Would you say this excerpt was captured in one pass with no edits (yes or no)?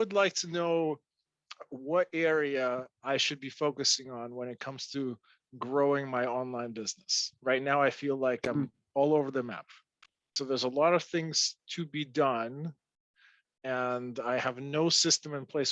no